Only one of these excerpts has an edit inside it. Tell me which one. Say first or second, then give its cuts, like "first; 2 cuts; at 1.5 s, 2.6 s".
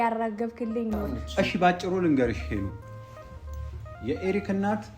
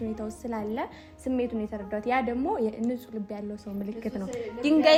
first; 1 cut; at 1.1 s